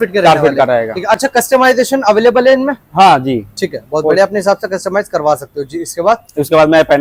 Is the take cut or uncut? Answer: uncut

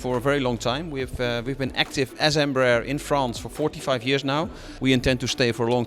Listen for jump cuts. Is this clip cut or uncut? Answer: cut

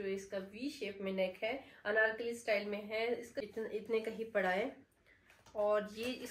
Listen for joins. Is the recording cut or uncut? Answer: cut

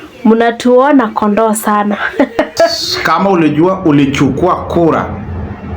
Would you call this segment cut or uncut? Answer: cut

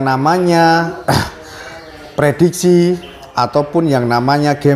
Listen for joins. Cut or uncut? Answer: uncut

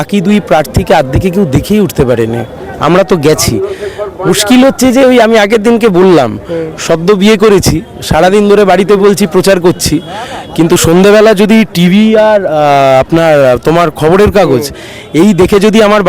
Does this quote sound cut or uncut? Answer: uncut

